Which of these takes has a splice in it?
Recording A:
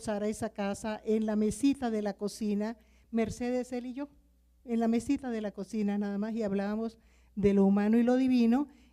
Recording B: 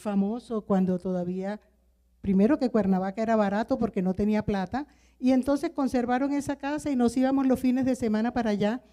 A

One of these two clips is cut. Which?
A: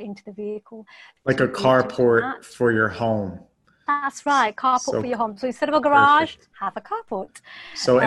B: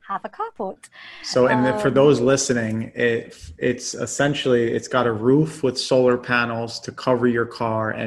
A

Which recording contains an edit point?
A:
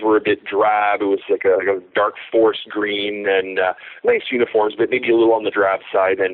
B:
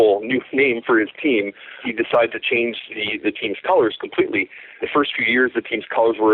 B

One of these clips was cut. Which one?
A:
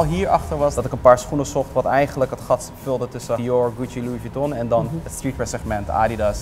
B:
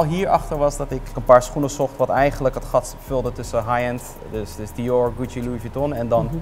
A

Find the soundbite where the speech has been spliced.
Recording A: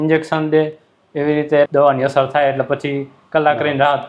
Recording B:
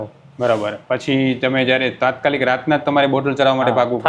A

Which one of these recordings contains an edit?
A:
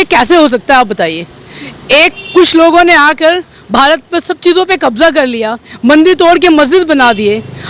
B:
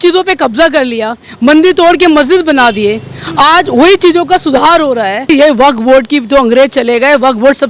B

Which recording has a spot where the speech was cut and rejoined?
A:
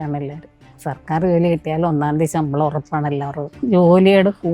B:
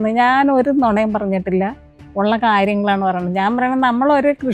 A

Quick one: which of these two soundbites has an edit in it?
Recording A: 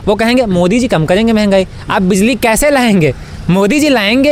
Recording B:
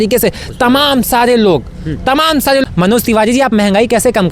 B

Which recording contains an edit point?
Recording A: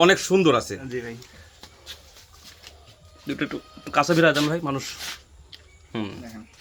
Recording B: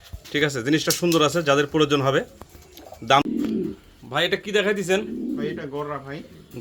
B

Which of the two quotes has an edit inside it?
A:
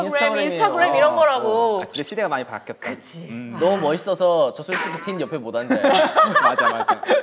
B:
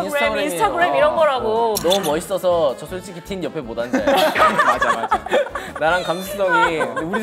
B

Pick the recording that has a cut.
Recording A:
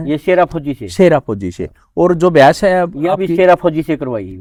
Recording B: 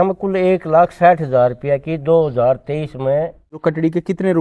B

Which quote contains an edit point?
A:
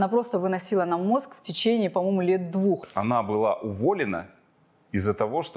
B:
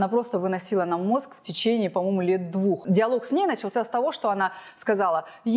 A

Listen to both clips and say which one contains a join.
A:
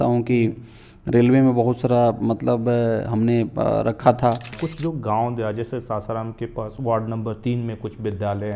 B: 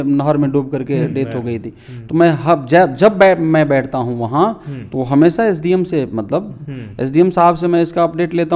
A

